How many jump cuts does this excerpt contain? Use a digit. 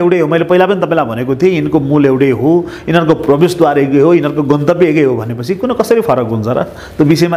0